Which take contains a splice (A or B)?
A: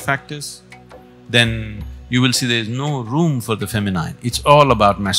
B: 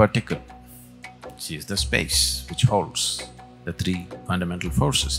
B